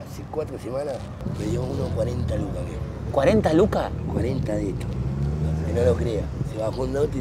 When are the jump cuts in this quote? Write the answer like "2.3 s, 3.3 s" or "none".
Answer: none